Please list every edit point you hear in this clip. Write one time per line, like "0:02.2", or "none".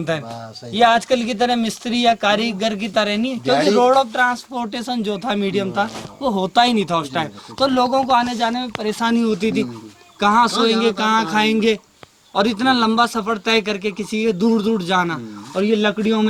none